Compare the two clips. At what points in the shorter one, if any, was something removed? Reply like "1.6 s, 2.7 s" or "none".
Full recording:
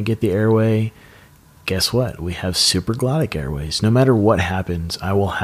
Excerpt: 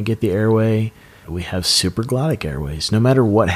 1.3 s

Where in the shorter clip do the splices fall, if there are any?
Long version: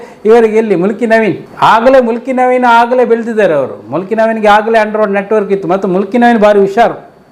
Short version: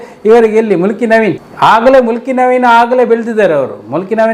none

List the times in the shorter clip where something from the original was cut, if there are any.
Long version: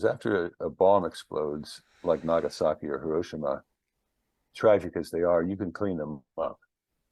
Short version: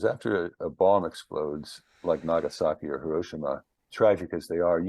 3.8 s

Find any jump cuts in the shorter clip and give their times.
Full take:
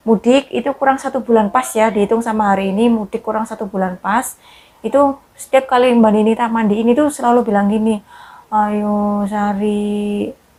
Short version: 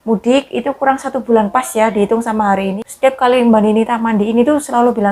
2.7 s

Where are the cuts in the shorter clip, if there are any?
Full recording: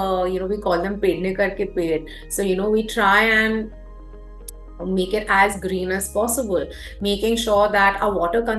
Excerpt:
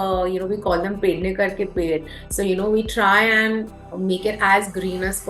3.8 s

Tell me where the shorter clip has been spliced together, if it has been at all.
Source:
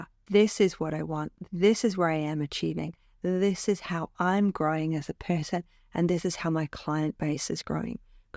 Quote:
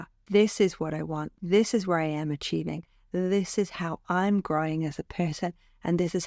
1.3 s

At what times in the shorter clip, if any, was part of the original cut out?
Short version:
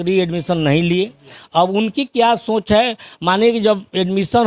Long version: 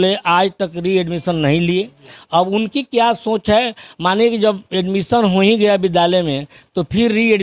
none

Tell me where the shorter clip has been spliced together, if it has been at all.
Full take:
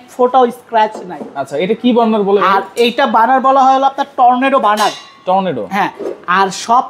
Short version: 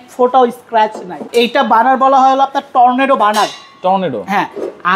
1.2 s

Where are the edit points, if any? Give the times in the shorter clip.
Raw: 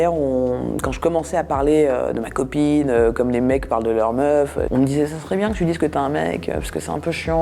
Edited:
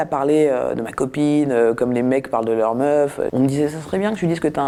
none

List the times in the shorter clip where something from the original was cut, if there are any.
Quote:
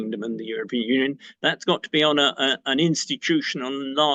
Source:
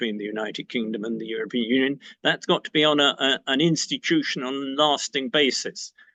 none

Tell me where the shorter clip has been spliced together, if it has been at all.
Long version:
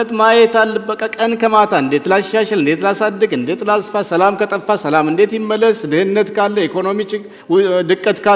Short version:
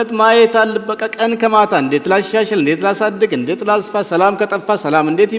none

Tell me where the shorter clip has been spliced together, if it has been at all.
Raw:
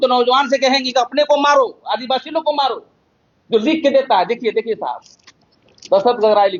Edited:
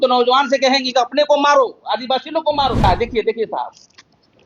2.8 s

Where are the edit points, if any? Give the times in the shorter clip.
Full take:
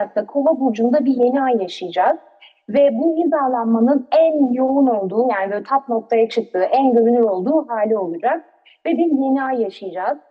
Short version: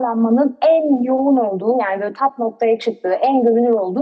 none

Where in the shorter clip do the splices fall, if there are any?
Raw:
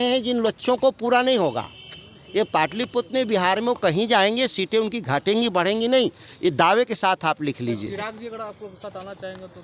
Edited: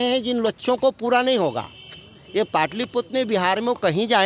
none

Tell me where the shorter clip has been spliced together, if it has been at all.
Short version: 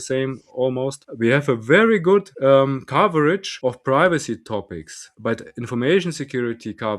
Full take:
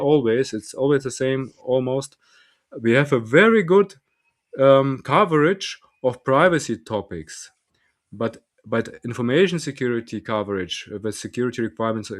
1.0 s, 2.3 s, 3.5 s, 5.0 s

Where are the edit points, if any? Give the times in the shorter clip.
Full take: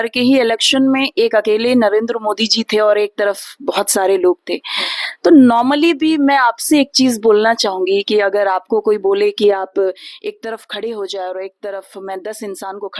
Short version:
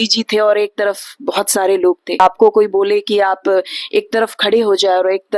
2.2 s

